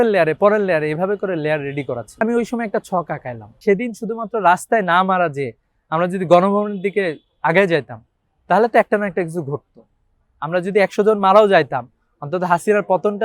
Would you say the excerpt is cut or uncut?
cut